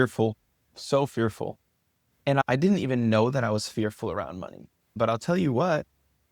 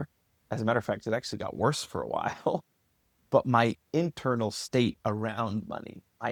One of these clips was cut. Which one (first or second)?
first